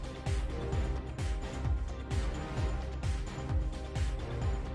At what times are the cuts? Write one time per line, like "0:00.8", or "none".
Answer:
none